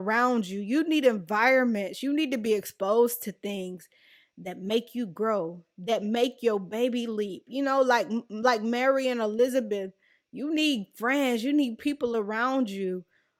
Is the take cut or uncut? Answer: uncut